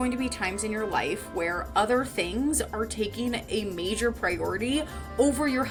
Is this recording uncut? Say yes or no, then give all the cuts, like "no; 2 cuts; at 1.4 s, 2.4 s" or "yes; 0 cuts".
yes; 0 cuts